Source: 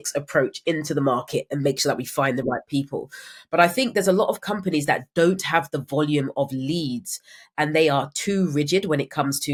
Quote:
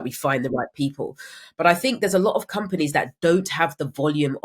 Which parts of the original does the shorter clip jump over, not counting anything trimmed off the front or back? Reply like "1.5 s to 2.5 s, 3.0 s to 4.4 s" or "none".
none